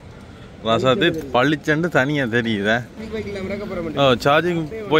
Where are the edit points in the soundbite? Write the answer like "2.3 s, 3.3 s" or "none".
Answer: 3.0 s